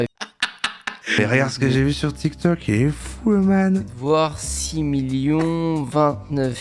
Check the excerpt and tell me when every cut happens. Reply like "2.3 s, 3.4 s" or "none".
1.2 s